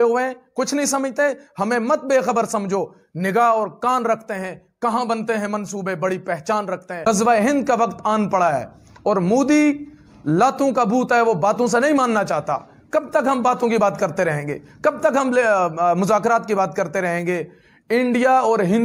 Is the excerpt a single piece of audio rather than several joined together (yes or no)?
no